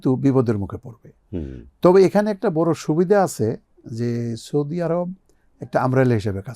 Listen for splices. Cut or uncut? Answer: uncut